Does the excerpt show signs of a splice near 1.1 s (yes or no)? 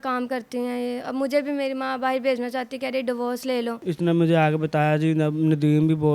no